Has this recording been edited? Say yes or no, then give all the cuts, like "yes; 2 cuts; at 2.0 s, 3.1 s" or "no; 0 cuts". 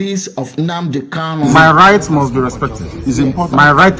yes; 1 cut; at 1.4 s